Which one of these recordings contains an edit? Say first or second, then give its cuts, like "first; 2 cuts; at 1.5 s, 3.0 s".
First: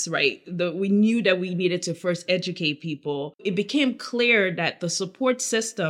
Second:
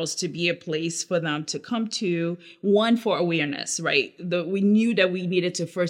first; 1 cut; at 3.5 s